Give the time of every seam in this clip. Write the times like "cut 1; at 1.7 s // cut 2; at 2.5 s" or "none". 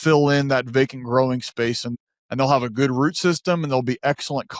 cut 1; at 1.9 s

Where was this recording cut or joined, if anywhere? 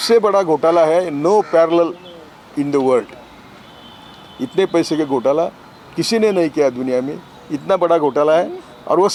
none

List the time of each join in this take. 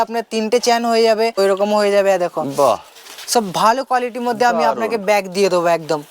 cut 1; at 1.4 s

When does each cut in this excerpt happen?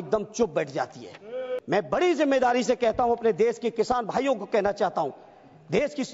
cut 1; at 1.6 s

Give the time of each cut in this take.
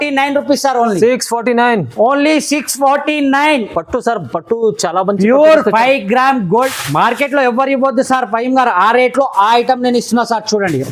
cut 1; at 6.7 s

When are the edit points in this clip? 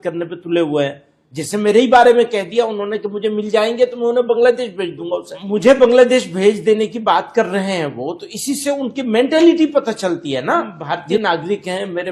cut 1; at 5.3 s // cut 2; at 11.2 s

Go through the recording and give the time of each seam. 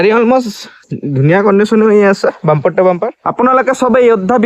cut 1; at 3.2 s

